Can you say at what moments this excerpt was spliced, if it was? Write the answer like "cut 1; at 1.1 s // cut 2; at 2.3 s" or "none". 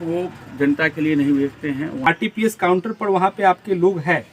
cut 1; at 2.0 s